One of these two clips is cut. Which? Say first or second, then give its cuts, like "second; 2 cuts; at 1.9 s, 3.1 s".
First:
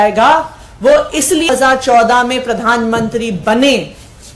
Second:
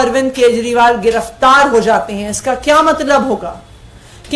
first; 1 cut; at 1.5 s